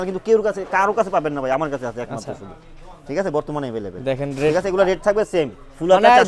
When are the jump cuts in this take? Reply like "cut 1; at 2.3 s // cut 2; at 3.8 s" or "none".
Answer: none